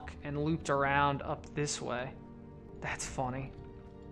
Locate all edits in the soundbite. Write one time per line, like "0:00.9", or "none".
0:02.6

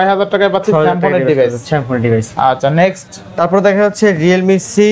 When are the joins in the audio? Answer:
none

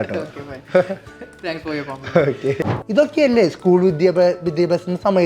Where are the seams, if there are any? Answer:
0:02.7

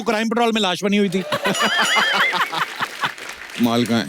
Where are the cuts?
0:03.1

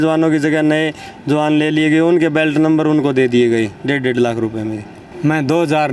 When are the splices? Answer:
0:04.9

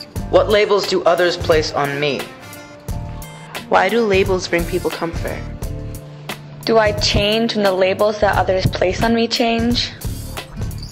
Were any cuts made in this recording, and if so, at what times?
0:02.2
0:03.7

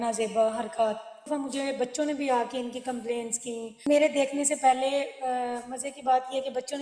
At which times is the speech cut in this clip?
0:01.3
0:03.8

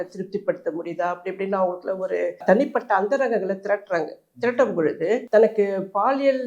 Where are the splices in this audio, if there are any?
0:02.4
0:05.2

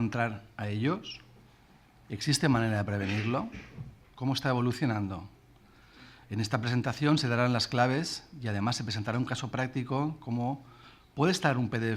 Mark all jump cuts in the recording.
none

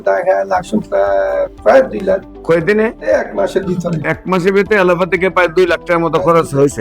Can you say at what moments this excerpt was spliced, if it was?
none

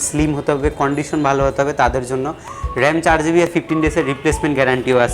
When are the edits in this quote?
0:03.5

